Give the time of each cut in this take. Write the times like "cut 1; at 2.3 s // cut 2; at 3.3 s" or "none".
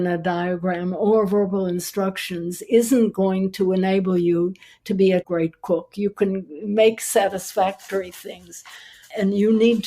cut 1; at 5.3 s